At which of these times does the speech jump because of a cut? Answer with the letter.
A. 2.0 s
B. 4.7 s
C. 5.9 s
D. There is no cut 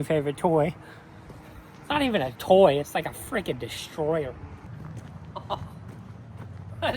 B